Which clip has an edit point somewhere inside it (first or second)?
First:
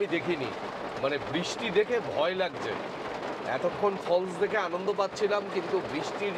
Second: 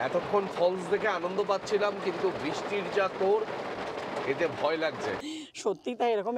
second